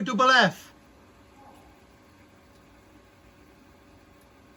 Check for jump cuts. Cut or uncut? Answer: uncut